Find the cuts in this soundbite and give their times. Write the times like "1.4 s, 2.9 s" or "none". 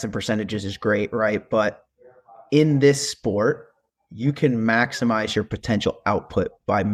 none